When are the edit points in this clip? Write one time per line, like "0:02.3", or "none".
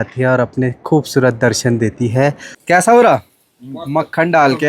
0:02.5

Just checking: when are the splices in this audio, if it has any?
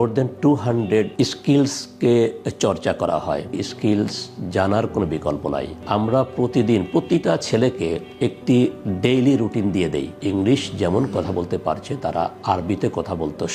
0:03.6
0:05.8
0:10.2

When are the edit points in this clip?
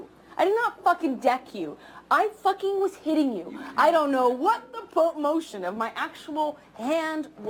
none

